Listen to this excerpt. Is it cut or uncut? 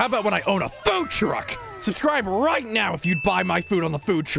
cut